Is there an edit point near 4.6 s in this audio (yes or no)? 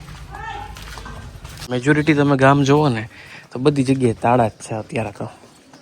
no